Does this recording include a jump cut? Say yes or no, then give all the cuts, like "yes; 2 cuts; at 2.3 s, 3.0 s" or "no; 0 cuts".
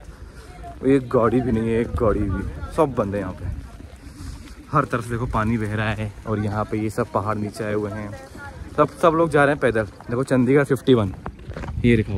no; 0 cuts